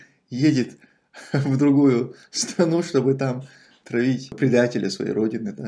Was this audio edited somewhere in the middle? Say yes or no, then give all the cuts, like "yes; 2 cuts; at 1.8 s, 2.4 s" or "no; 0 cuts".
yes; 1 cut; at 4.4 s